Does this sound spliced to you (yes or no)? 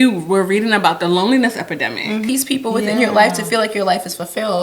yes